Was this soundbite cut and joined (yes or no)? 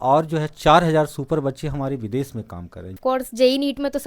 yes